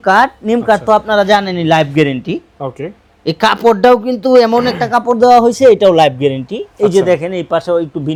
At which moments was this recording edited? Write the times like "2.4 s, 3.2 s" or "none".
none